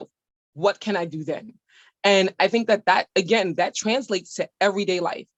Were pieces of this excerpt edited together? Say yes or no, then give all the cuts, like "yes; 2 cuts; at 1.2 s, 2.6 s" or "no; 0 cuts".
no; 0 cuts